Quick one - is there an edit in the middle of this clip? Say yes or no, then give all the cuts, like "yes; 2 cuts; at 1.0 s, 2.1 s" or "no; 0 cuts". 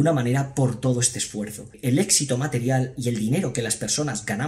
yes; 1 cut; at 1.7 s